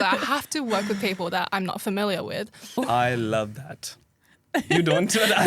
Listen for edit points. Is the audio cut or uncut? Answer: cut